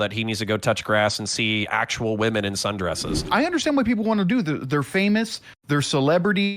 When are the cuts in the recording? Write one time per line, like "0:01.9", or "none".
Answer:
0:03.2